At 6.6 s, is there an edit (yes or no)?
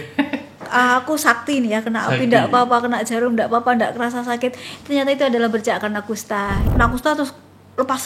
yes